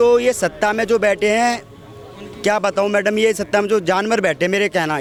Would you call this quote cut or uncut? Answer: uncut